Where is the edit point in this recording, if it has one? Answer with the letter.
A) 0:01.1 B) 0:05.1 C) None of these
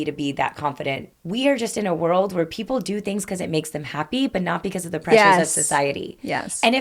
A